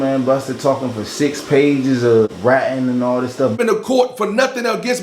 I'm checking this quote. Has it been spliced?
yes; 2 cuts; at 2.3 s, 3.6 s

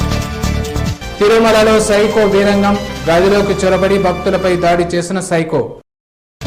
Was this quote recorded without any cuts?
yes; 0 cuts

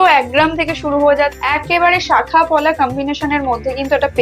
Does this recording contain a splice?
yes; 1 cut; at 1.4 s

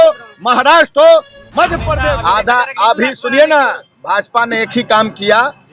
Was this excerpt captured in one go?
no; 1 cut; at 1.9 s

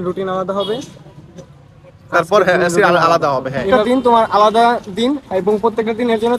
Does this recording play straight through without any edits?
no; 1 cut; at 3.6 s

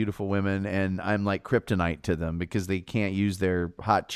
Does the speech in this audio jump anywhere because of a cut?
no; 0 cuts

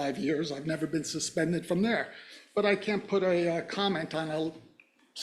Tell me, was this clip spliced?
no; 0 cuts

